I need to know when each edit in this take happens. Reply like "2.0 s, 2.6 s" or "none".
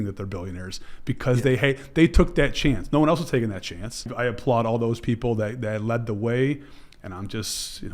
4.1 s